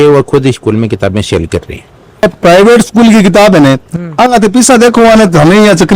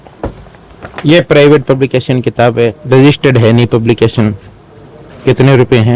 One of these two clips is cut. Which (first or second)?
first